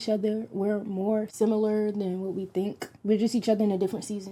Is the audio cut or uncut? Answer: cut